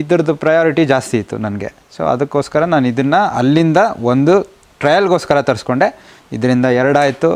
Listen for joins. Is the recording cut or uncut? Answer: uncut